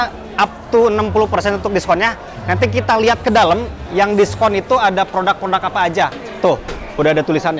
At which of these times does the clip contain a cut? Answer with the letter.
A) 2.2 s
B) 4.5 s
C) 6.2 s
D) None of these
C